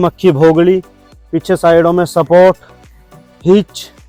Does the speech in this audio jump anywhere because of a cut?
no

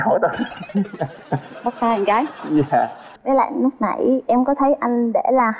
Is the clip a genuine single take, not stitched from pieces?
no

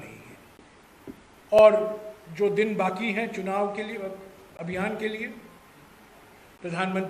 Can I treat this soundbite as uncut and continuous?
no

